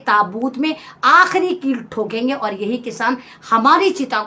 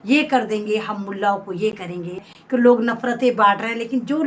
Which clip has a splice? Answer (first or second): second